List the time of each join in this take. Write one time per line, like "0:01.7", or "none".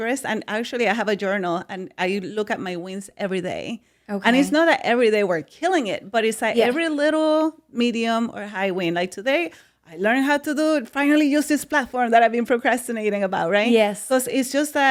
none

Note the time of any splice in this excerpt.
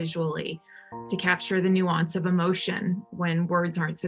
0:03.1

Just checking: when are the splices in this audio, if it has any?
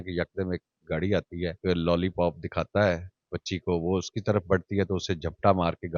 0:01.6

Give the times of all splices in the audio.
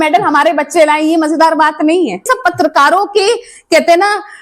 0:02.3

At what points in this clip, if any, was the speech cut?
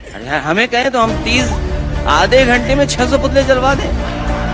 none

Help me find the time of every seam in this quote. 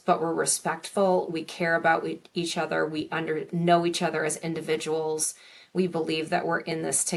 none

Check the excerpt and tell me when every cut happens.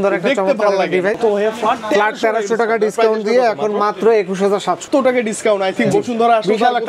0:01.2
0:04.8

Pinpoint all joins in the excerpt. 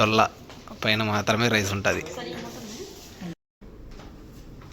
0:03.3

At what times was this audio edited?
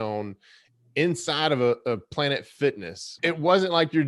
0:03.1

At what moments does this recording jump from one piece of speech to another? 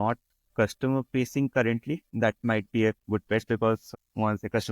0:02.1
0:03.9

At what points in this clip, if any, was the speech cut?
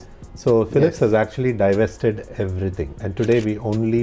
0:03.0

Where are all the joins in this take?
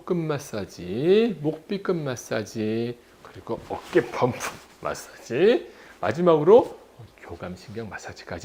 none

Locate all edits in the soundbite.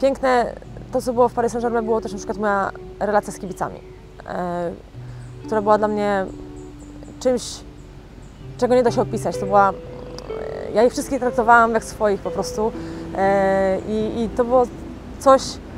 none

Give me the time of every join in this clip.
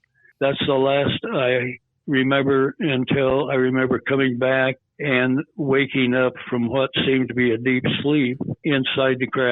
0:08.6

